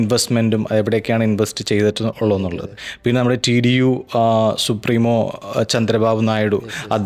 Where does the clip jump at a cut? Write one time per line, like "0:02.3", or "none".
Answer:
none